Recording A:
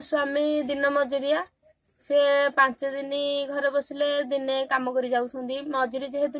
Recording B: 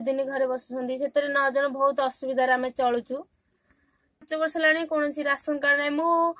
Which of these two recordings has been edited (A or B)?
B